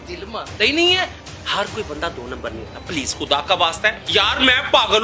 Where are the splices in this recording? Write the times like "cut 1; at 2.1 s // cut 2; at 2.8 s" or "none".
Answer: cut 1; at 1.2 s // cut 2; at 4.0 s